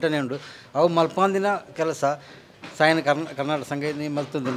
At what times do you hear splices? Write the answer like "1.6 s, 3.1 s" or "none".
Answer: none